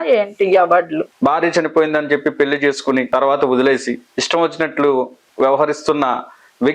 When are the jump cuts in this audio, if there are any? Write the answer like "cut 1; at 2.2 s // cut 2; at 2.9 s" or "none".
cut 1; at 1.1 s // cut 2; at 3.1 s // cut 3; at 4.1 s // cut 4; at 5.2 s